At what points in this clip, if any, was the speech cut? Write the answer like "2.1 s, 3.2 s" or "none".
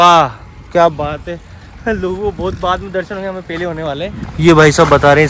4.2 s